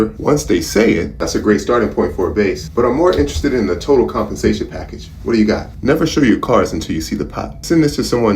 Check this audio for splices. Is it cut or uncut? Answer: cut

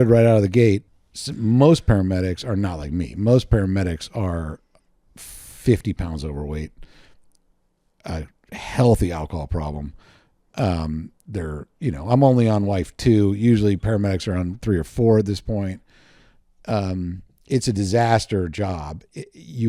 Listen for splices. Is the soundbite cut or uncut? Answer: cut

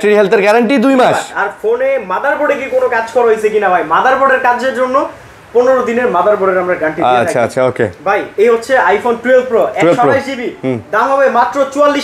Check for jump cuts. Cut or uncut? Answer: uncut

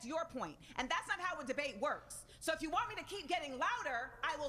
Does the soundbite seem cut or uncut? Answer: uncut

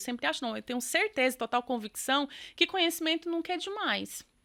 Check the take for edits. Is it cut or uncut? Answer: uncut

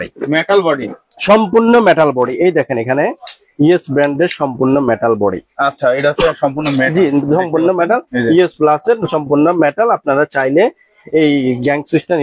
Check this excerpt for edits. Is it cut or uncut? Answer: uncut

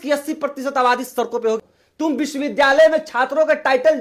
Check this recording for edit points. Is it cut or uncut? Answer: cut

